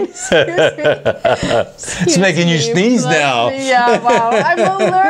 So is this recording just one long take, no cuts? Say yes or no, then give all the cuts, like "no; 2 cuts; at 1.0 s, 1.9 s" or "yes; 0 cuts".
yes; 0 cuts